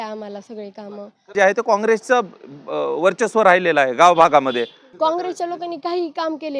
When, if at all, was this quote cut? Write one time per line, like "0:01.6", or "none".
0:01.3
0:04.8